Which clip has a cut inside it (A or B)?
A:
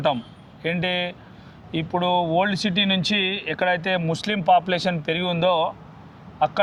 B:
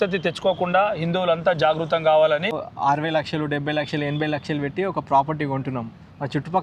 B